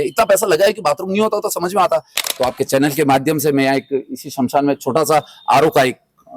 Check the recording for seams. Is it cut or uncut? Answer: cut